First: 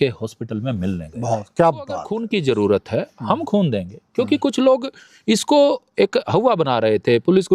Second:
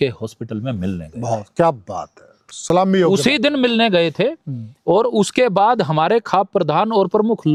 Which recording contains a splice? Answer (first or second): first